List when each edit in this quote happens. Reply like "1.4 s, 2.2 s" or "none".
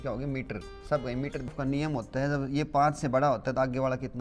1.5 s